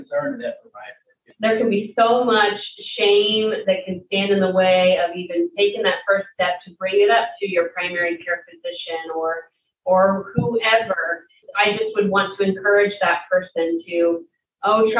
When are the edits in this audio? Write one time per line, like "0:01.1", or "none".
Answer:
0:01.3
0:11.5